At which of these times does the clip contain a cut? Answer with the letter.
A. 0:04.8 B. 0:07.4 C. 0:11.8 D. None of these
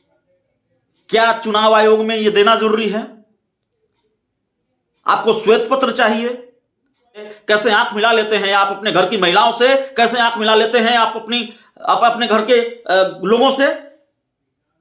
B